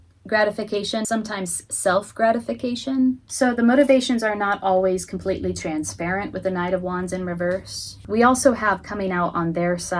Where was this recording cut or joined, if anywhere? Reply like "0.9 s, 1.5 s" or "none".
1.1 s, 3.3 s, 8.0 s